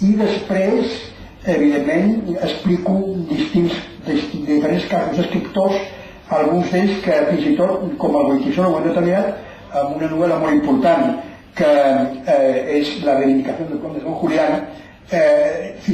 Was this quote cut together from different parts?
yes; 1 cut; at 5.1 s

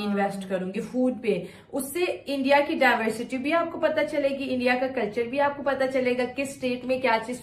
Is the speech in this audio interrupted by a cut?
no; 0 cuts

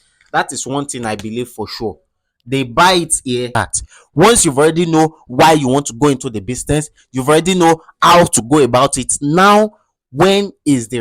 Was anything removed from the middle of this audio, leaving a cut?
yes; 1 cut; at 3.5 s

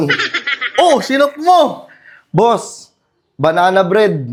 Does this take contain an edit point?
no; 0 cuts

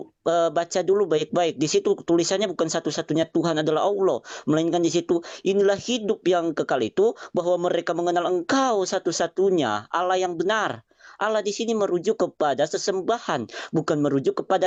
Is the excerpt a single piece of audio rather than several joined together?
yes; 0 cuts

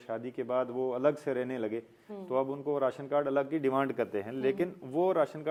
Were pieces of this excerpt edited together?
no; 0 cuts

